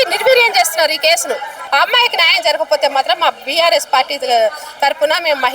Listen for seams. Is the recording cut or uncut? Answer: cut